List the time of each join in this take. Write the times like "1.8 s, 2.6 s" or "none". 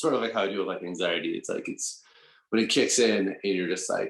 none